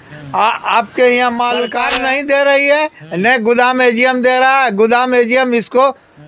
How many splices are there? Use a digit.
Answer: 1